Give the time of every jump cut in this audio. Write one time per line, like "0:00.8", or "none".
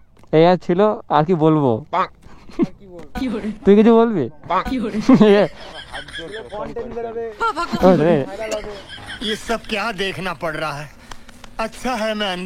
none